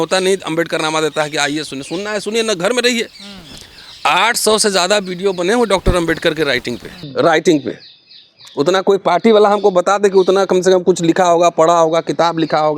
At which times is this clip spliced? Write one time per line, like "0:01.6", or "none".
none